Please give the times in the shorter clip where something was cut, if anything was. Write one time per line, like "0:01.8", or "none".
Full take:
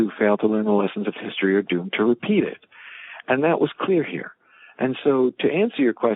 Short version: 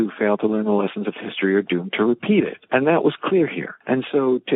0:02.6
0:03.7